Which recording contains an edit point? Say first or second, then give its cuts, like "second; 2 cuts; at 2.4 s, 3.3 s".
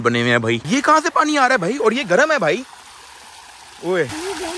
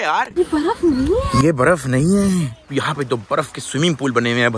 second; 1 cut; at 2.7 s